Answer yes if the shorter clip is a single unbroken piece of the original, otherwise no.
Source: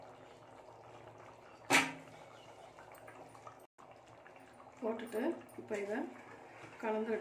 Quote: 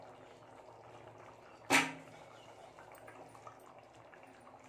no